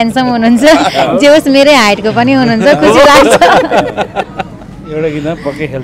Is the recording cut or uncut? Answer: uncut